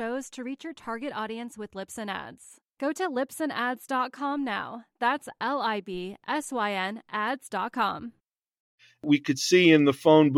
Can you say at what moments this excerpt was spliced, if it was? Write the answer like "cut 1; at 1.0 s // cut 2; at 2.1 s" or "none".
cut 1; at 9.0 s